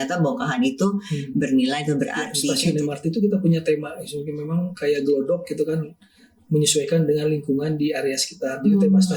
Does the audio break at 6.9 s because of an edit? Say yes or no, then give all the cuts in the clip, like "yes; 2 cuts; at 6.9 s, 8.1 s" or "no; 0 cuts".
no; 1 cut; at 2.4 s